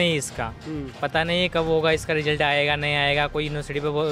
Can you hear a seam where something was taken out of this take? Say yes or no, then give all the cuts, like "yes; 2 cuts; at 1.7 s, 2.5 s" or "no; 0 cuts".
no; 0 cuts